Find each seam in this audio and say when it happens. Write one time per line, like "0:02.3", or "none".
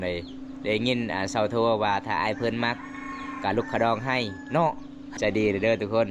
0:05.1